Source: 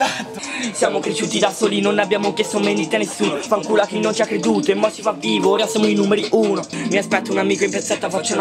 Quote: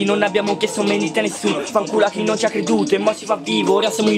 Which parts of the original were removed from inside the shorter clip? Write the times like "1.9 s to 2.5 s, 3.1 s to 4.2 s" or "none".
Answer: none